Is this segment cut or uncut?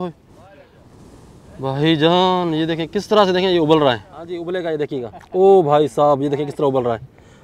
cut